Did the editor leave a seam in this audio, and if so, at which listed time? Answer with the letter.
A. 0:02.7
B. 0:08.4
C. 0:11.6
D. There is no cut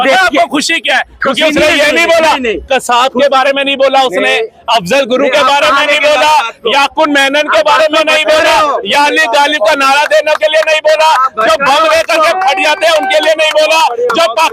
D